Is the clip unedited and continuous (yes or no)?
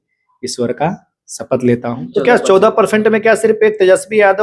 no